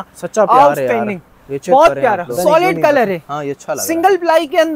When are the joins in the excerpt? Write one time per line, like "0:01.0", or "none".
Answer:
0:02.3